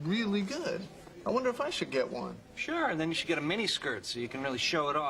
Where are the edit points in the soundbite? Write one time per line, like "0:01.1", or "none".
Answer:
0:02.7